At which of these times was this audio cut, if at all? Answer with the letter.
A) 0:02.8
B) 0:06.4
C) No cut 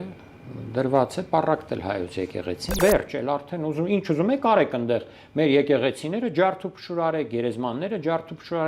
A